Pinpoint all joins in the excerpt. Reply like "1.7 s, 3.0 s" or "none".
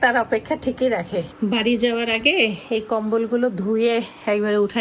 1.3 s